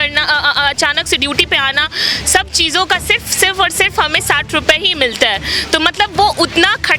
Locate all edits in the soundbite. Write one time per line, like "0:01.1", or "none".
none